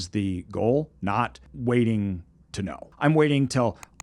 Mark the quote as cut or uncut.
cut